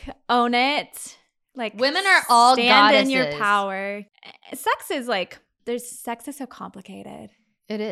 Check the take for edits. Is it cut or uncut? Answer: cut